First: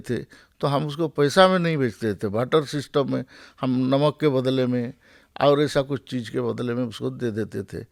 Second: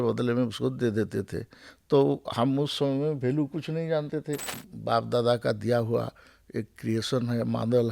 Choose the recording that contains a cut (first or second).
second